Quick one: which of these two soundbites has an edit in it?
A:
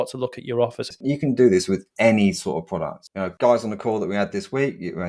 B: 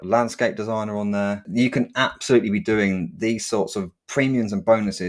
A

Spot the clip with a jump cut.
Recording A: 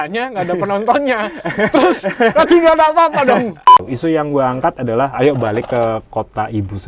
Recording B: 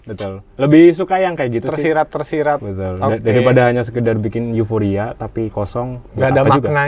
A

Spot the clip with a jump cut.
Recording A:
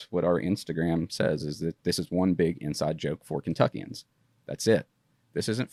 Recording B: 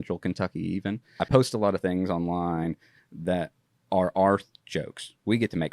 B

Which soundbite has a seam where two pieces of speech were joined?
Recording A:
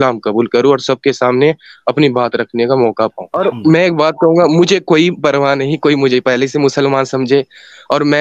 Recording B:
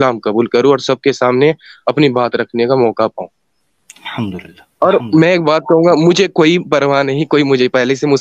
A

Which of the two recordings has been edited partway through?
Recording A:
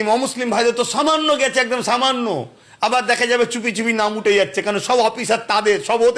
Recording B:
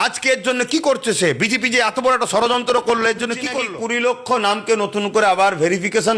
B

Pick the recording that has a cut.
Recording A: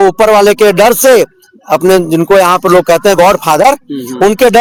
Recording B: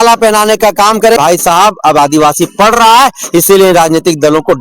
B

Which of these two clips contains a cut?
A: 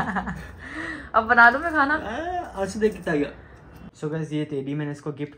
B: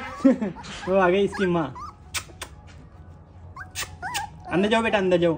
A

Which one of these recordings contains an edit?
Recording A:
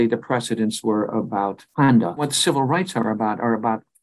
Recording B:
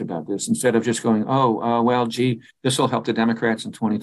A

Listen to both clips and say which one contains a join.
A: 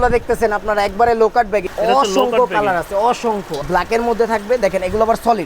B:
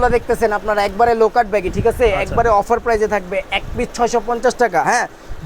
A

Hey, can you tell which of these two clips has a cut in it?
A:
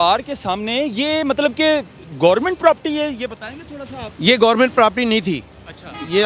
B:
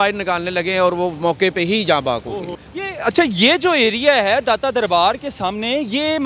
B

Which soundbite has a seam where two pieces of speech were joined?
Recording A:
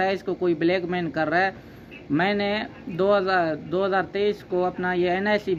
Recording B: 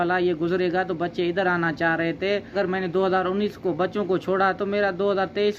B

